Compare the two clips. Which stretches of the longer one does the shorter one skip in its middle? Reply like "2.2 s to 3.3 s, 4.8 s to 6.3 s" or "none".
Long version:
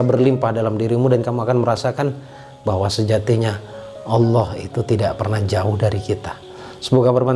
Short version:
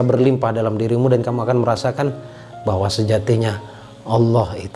none